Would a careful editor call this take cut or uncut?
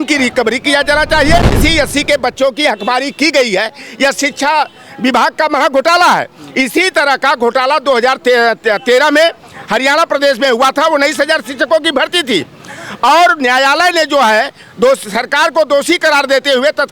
cut